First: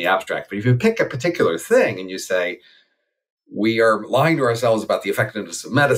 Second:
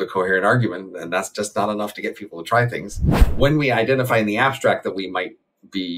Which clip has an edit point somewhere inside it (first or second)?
second